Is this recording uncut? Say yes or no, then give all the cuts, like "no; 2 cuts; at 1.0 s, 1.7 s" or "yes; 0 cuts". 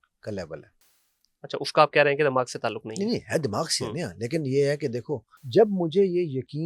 no; 1 cut; at 5.3 s